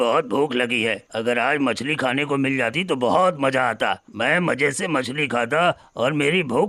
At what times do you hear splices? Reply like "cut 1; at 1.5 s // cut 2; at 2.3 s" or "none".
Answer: none